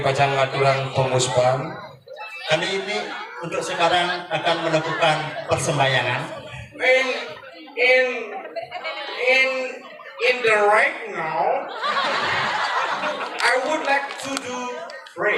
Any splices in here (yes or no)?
no